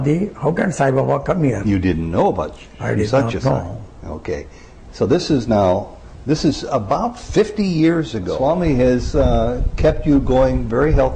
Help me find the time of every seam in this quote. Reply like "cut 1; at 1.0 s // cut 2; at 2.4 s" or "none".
cut 1; at 8.3 s